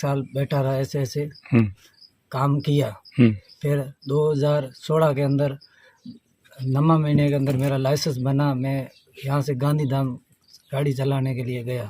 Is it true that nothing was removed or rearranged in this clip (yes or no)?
yes